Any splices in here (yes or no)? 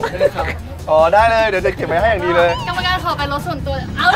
no